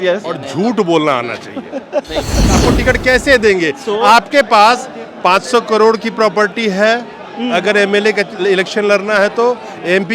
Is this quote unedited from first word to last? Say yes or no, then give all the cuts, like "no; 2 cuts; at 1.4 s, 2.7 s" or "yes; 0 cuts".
no; 1 cut; at 2.5 s